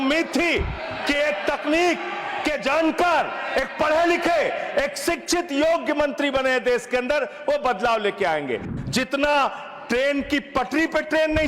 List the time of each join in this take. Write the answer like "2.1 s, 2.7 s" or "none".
8.7 s